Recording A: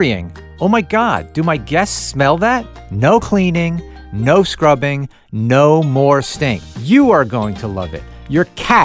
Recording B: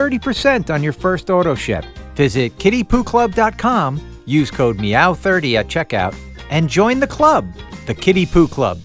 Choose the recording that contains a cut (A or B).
A